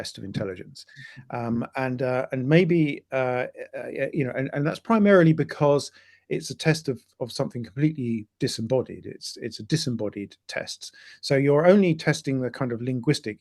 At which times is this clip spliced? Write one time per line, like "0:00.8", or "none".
none